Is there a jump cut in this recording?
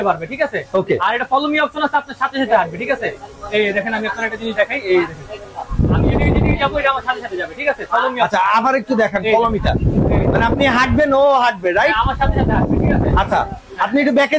no; 0 cuts

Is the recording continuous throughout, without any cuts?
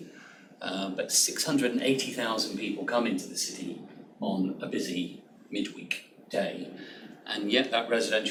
yes; 0 cuts

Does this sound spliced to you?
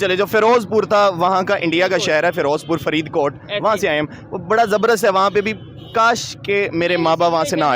no; 0 cuts

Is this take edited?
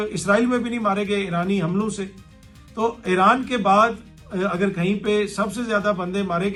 no; 0 cuts

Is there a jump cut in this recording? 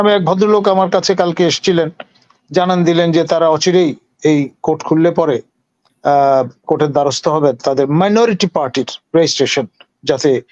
no; 0 cuts

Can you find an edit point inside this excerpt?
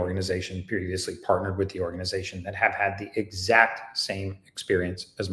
no; 0 cuts

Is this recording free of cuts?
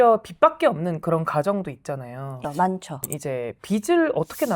no; 1 cut; at 2.9 s

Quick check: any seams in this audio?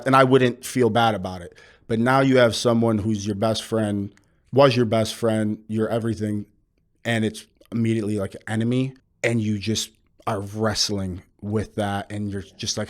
yes; 1 cut; at 9.0 s

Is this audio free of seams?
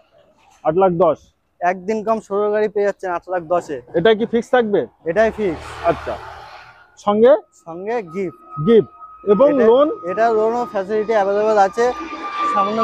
yes; 0 cuts

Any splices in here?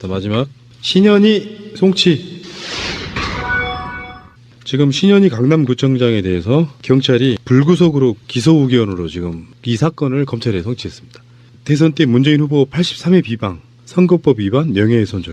no; 0 cuts

